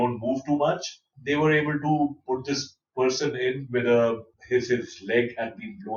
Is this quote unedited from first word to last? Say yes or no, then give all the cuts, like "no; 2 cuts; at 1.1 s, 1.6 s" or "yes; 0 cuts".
no; 2 cuts; at 1.1 s, 4.3 s